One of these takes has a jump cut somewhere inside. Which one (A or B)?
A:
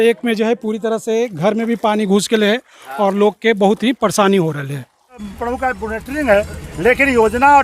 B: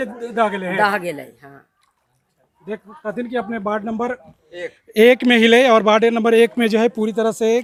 A